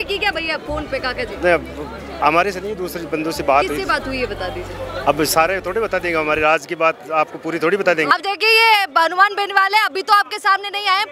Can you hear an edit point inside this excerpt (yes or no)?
yes